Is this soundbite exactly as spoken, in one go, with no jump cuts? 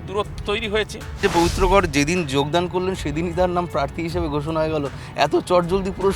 no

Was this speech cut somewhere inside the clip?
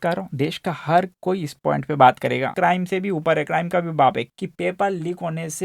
yes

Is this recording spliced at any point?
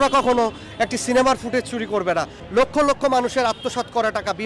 yes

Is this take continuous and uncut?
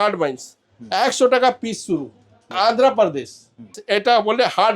no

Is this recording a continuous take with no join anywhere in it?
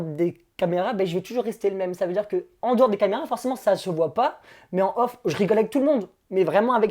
yes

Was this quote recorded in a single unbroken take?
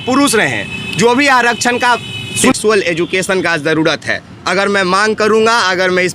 no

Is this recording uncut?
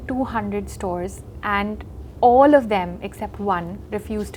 yes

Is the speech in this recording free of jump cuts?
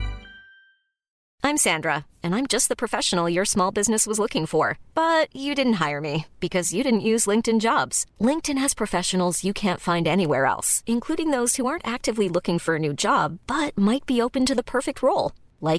no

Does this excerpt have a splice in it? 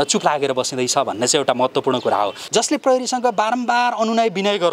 yes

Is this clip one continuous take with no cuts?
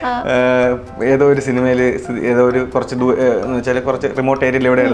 yes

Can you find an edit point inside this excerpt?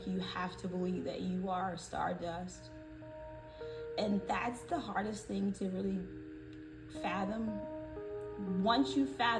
no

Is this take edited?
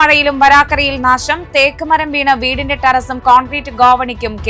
no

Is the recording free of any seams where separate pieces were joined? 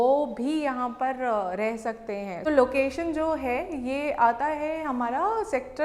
no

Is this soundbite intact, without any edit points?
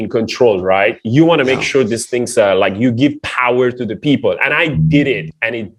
yes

